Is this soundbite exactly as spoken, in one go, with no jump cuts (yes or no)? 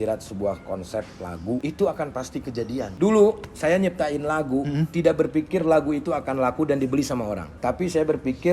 no